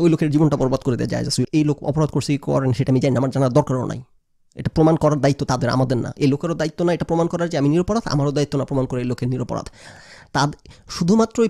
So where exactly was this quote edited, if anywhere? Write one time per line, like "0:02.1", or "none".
0:01.5